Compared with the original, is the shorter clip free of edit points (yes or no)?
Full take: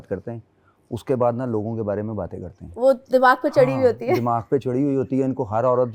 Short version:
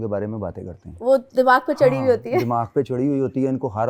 yes